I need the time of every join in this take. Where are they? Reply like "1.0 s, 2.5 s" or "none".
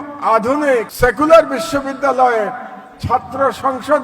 0.9 s